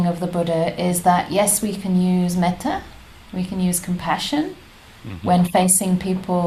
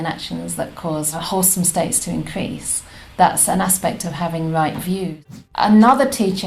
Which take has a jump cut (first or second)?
second